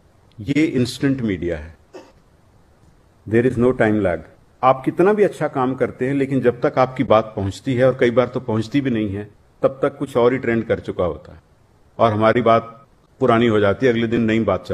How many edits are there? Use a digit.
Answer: 1